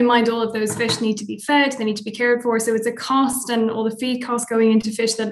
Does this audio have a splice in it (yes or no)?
no